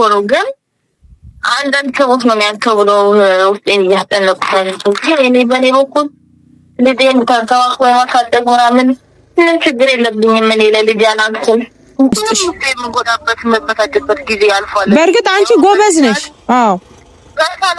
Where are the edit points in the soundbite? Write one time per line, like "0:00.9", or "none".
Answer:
0:12.2